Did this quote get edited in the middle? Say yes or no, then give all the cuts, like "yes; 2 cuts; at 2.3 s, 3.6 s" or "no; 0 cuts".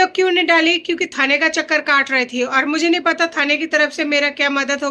no; 0 cuts